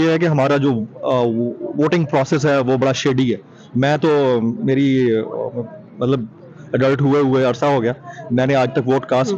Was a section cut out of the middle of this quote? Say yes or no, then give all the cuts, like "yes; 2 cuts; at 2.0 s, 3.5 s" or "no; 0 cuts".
no; 0 cuts